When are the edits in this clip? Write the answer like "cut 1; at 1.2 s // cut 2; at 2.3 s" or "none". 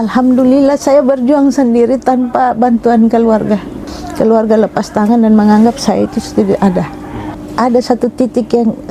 cut 1; at 7.4 s